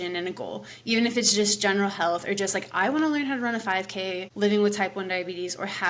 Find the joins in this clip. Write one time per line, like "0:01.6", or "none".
0:04.3